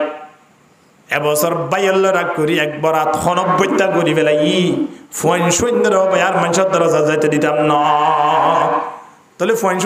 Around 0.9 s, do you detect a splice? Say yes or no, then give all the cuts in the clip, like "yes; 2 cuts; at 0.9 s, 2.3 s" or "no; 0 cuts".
no; 0 cuts